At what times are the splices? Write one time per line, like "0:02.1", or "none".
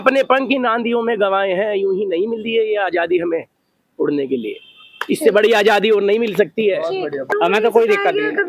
0:07.3